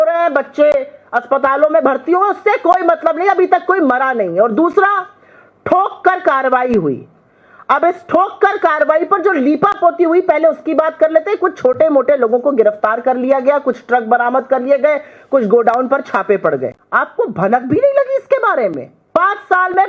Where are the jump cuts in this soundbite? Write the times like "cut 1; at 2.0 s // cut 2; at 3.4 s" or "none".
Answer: cut 1; at 16.8 s // cut 2; at 18.9 s